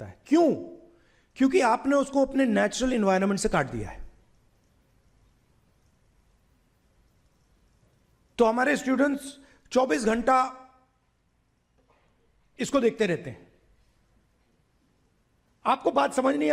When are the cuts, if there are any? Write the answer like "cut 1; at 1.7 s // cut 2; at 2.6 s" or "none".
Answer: none